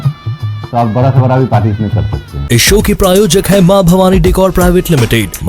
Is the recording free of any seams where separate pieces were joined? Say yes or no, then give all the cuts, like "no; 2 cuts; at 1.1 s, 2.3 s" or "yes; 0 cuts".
yes; 0 cuts